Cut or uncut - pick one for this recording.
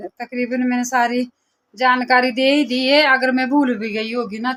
uncut